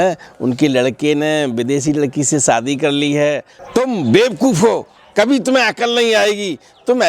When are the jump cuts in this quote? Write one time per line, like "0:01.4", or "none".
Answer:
0:03.5